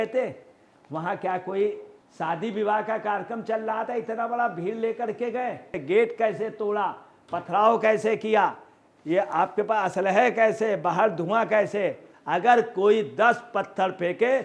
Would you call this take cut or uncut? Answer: cut